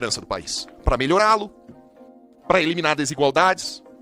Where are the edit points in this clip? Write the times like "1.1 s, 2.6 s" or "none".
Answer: none